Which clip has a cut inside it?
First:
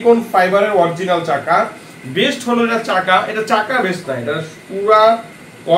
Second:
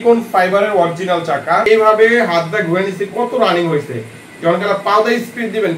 second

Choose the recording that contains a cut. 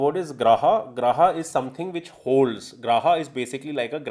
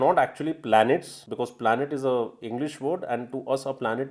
second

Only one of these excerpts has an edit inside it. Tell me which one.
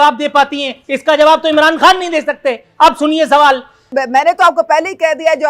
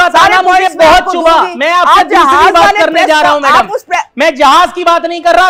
first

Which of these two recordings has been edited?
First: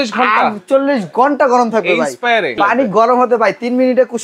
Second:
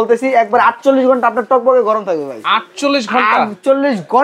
first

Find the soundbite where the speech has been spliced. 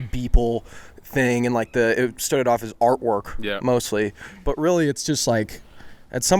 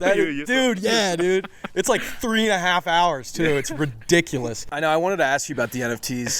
second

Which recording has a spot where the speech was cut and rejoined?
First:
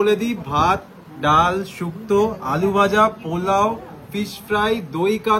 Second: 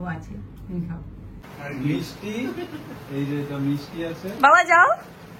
second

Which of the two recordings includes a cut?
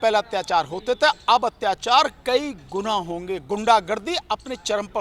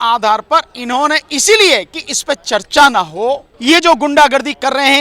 second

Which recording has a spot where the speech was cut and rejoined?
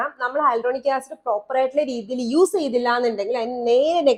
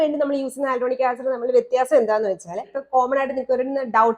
second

